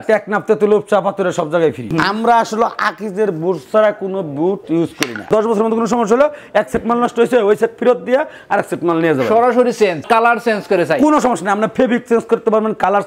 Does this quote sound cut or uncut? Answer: cut